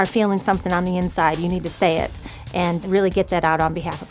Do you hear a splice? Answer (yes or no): yes